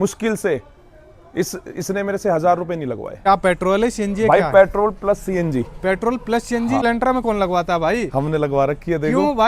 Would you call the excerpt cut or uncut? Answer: cut